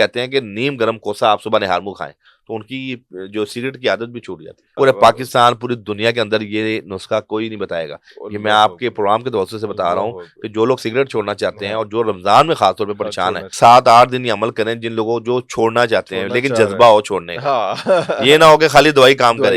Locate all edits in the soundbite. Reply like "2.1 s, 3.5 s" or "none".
4.7 s, 13.5 s